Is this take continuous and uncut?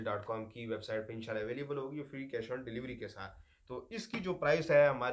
yes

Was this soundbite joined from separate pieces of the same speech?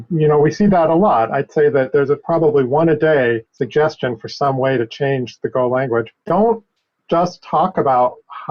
yes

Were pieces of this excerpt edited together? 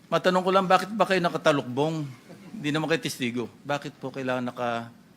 yes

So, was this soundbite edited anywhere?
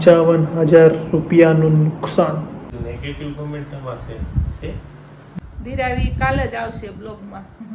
yes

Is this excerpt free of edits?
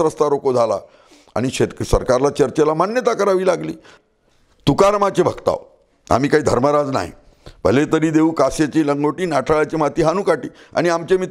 no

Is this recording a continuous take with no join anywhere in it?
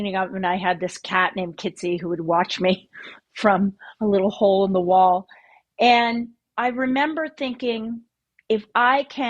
no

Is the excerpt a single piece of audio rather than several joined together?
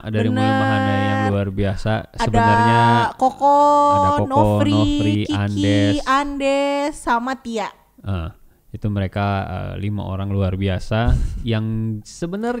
yes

